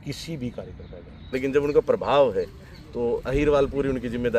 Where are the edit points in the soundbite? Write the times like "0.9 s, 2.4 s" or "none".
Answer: 1.1 s